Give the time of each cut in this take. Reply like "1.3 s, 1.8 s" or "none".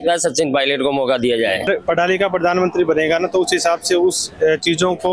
1.7 s